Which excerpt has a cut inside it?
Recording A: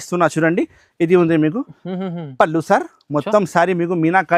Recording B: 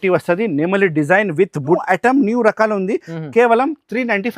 B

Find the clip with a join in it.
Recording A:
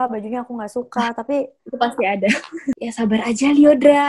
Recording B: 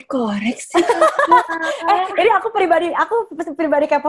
A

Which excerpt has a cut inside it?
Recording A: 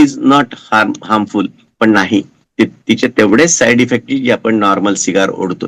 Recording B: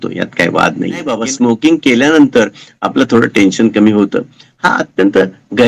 B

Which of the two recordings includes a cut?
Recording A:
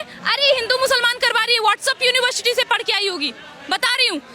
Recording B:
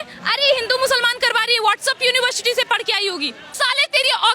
B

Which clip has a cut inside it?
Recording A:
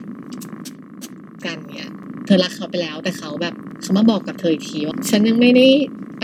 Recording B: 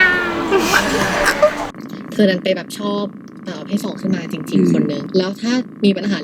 B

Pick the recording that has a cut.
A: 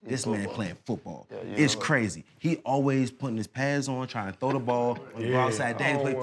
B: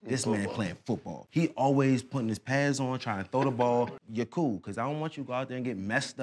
B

